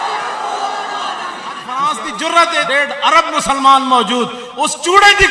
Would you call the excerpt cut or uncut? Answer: cut